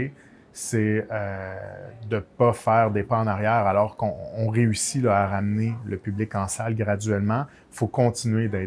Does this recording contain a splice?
no; 0 cuts

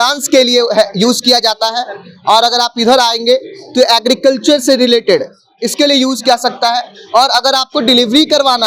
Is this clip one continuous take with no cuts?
yes; 0 cuts

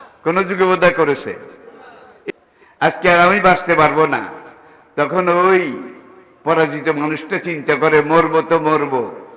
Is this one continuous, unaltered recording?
no; 1 cut; at 2.3 s

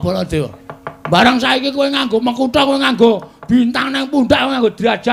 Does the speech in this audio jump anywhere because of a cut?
no; 0 cuts

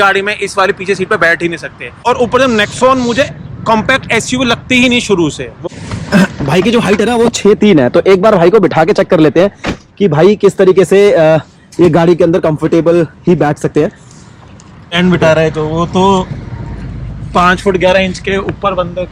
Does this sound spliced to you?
yes; 3 cuts; at 1.9 s, 5.6 s, 14.9 s

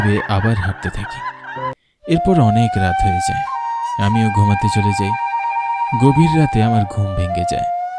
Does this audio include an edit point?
yes; 1 cut; at 2.0 s

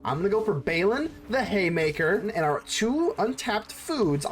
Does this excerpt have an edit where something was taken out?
yes; 1 cut; at 2.3 s

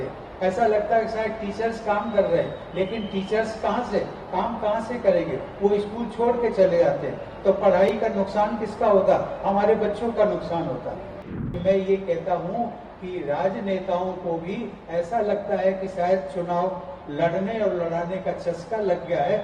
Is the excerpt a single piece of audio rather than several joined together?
no; 1 cut; at 11.2 s

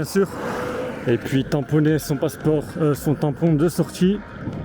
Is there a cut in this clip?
no; 0 cuts

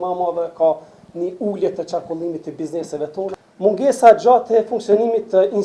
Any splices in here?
yes; 1 cut; at 3.3 s

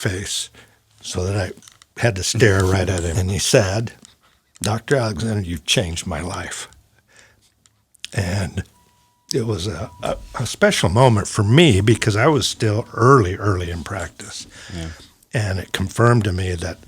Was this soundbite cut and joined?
yes; 1 cut; at 3.1 s

